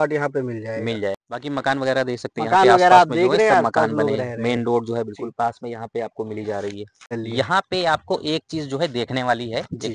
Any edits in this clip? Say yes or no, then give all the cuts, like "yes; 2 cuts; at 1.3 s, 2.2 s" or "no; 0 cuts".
yes; 2 cuts; at 1.2 s, 7.2 s